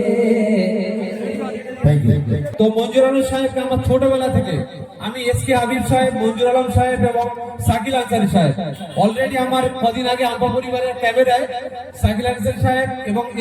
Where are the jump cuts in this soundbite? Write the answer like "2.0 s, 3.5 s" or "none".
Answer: 2.5 s